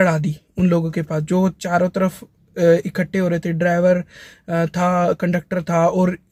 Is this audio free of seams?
yes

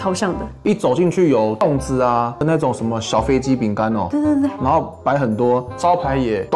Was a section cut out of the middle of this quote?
no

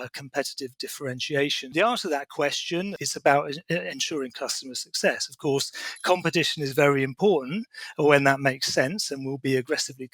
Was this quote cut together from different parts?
yes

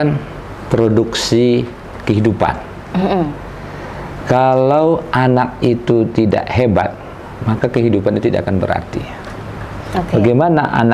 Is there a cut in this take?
no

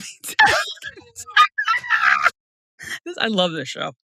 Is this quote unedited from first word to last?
yes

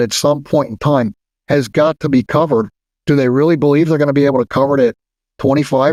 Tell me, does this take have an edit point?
no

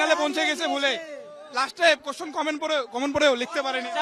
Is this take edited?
no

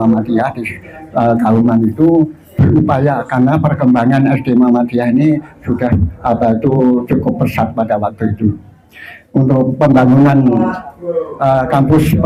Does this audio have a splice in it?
no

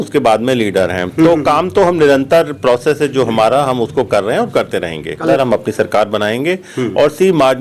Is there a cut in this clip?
yes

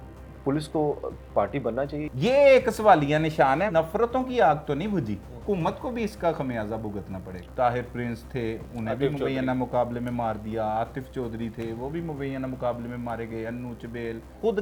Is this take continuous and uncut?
yes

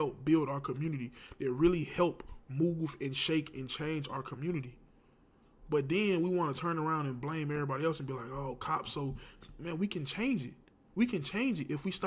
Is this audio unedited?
yes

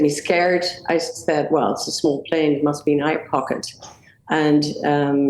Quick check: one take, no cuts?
yes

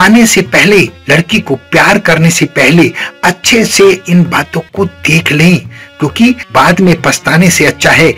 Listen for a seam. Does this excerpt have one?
yes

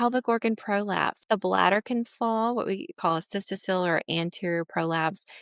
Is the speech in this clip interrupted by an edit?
yes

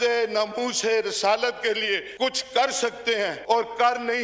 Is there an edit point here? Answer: yes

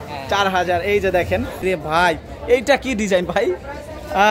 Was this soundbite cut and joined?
yes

